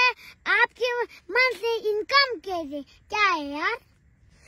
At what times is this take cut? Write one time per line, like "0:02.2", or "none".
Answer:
none